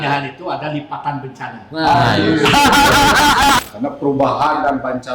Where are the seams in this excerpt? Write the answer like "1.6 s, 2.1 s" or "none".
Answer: 3.6 s